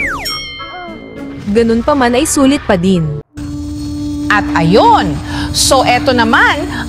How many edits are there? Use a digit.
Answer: 1